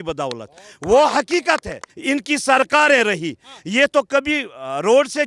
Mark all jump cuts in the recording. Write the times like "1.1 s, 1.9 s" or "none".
1.9 s